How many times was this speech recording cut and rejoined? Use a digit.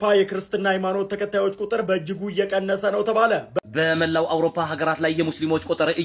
1